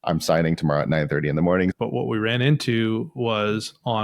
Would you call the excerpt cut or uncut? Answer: cut